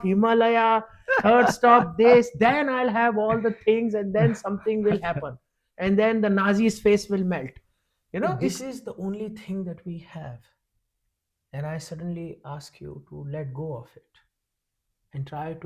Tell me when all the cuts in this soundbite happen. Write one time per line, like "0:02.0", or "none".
0:08.5